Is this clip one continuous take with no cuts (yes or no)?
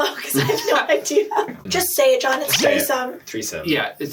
no